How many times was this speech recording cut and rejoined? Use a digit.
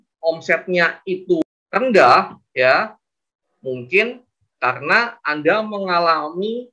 1